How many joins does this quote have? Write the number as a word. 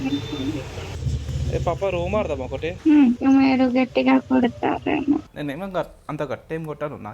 three